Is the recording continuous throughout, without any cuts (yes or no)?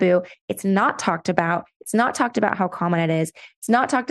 yes